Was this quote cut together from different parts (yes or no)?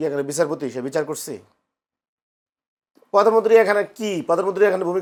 no